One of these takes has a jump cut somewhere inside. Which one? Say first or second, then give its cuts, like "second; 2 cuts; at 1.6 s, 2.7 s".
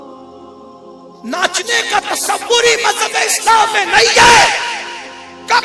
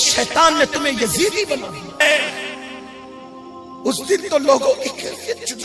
second; 1 cut; at 2.0 s